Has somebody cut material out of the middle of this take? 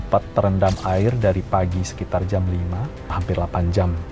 yes; 1 cut; at 3.2 s

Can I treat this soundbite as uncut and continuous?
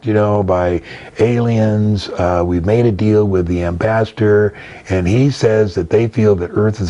yes; 0 cuts

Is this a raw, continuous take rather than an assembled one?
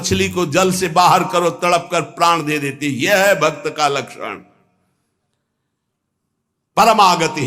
yes; 0 cuts

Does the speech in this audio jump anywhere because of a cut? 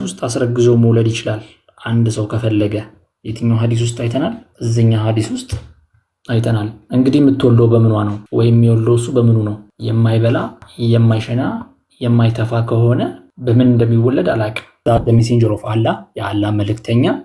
yes; 6 cuts; at 4.5 s, 8.2 s, 9.7 s, 10.6 s, 13.3 s, 14.7 s

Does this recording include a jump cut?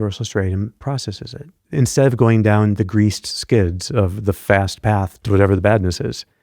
yes; 2 cuts; at 1.6 s, 5.1 s

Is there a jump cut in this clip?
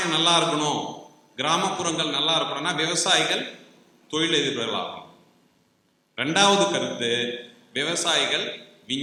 no; 0 cuts

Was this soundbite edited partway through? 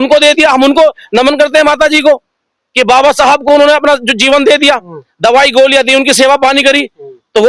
no; 0 cuts

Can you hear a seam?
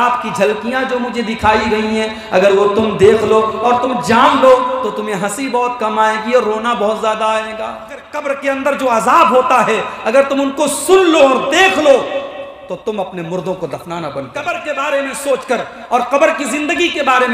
yes; 2 cuts; at 8.2 s, 14.4 s

